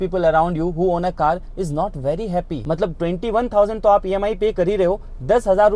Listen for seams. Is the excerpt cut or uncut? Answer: cut